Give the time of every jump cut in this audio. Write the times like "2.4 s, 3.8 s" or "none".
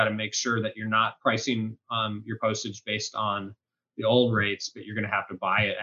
1.1 s